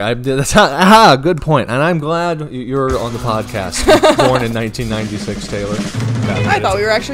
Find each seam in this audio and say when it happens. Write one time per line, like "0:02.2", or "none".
0:06.2